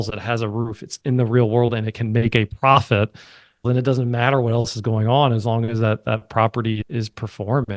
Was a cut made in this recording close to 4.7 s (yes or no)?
no